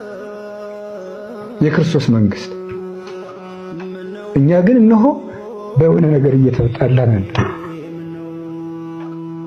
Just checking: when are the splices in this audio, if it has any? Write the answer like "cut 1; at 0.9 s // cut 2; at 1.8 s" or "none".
none